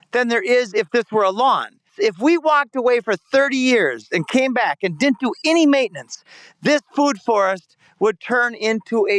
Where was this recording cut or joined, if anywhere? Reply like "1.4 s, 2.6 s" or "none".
1.9 s